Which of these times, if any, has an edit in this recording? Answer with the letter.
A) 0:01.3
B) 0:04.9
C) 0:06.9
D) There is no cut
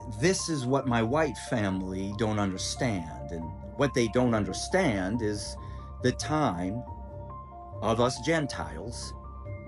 D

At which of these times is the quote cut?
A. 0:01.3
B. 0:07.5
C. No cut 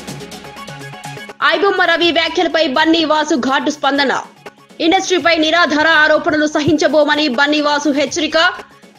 A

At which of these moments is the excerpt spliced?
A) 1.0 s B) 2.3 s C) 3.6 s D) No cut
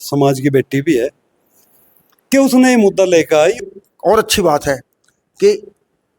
C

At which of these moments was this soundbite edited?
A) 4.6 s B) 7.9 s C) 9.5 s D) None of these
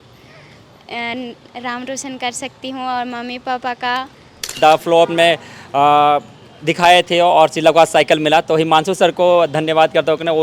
A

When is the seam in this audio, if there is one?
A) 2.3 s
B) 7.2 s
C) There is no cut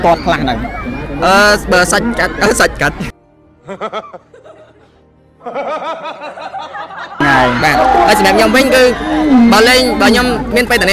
B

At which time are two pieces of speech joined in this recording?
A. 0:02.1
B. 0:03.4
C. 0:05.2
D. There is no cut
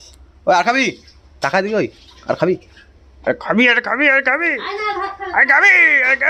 D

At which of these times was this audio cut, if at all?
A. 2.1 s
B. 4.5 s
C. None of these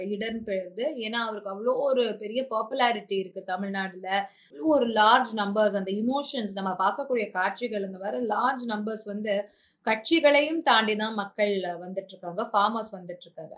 B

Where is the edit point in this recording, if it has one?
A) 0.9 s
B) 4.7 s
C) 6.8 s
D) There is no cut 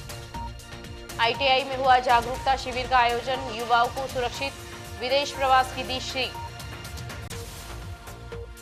D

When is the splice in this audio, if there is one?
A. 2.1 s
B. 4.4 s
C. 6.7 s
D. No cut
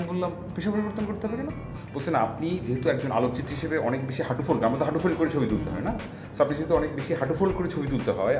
D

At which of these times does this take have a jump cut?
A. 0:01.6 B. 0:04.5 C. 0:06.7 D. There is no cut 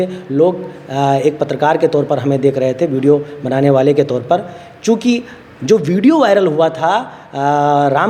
D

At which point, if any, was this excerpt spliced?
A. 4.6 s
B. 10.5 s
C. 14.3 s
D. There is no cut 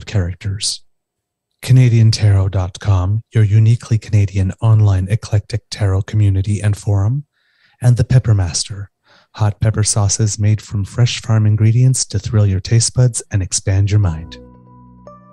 C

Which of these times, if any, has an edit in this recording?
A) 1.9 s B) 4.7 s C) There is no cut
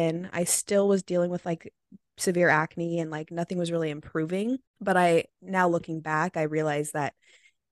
B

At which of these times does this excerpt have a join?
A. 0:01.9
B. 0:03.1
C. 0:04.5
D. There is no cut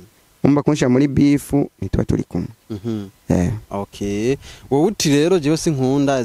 D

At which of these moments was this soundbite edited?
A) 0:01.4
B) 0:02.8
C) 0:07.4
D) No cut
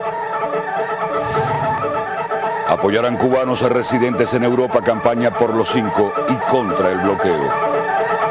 B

